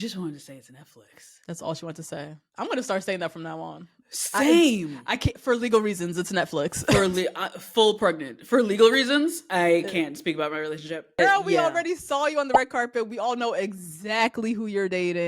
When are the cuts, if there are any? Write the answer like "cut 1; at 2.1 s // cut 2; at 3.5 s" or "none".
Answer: cut 1; at 11.2 s